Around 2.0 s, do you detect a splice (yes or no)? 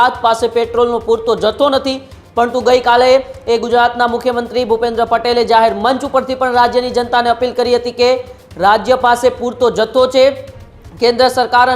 no